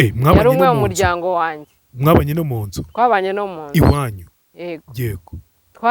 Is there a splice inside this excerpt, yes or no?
yes